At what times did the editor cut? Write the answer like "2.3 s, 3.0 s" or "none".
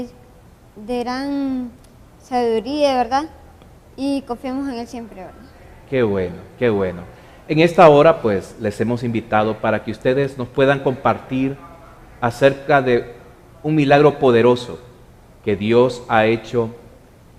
none

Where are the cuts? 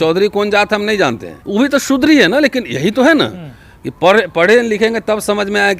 1.3 s

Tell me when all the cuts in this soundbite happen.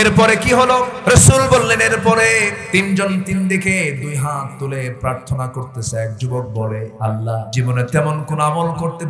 0.9 s, 2.6 s, 7.2 s

